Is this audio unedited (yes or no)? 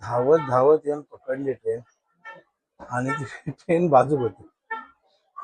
yes